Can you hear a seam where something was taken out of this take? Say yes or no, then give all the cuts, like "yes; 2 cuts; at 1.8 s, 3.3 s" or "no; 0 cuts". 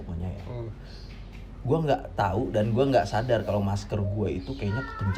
no; 0 cuts